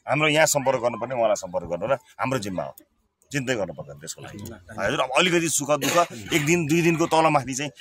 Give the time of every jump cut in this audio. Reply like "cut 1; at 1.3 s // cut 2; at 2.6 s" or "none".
none